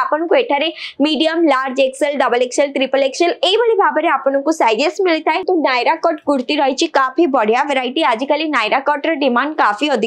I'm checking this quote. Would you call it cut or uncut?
cut